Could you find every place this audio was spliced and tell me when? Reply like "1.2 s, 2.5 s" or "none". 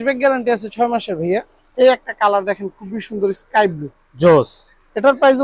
1.6 s